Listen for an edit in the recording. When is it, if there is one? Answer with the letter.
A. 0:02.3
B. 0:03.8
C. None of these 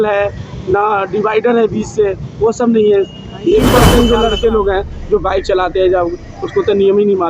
B